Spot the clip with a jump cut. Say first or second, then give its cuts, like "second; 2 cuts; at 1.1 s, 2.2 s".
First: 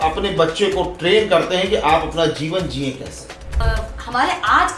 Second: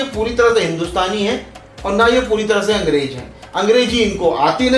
first; 1 cut; at 3.6 s